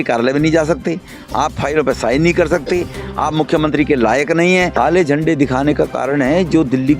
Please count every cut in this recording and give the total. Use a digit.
1